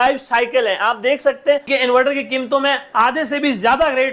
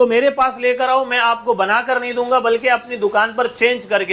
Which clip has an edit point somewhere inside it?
first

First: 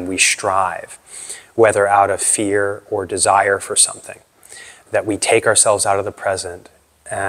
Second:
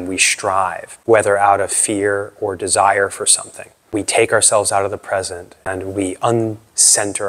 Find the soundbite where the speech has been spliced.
second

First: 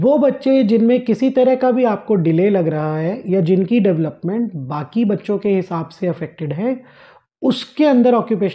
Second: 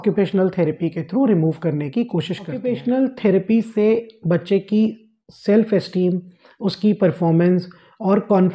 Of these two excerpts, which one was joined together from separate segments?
second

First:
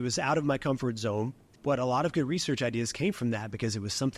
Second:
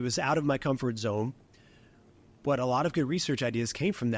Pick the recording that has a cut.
first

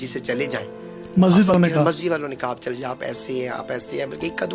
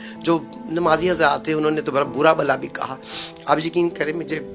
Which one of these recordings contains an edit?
first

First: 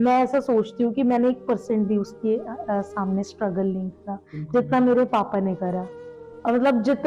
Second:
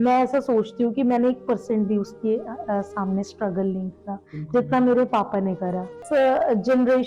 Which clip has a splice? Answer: second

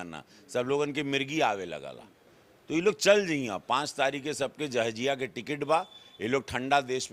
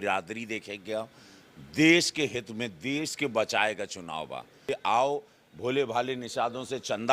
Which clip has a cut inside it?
second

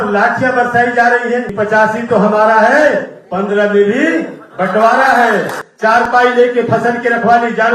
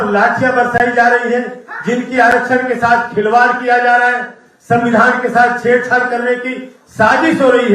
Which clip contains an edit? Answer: first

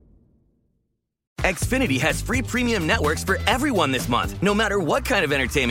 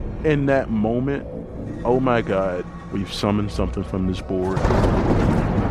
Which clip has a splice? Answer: first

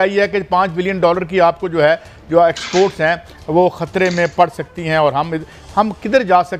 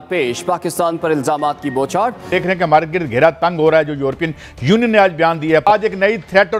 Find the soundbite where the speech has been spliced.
second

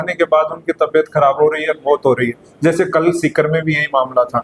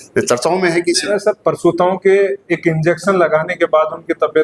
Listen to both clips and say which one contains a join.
second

